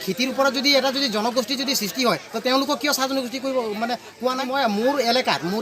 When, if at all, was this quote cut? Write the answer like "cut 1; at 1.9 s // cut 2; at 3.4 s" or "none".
cut 1; at 4.4 s

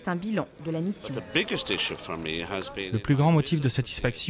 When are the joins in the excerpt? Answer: cut 1; at 1.1 s // cut 2; at 2.9 s

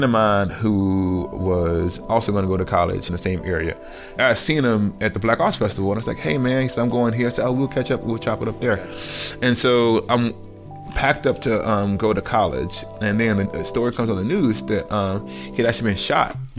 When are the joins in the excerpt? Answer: cut 1; at 4.1 s

